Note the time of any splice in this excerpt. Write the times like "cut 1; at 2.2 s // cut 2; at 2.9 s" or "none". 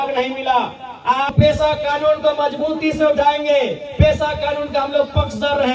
cut 1; at 1.3 s